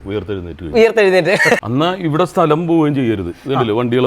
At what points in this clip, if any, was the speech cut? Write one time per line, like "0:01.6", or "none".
0:01.6